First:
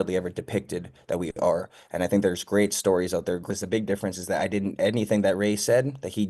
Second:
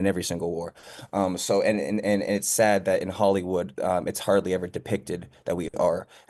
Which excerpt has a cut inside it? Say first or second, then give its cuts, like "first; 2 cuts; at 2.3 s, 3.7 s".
first; 1 cut; at 3.5 s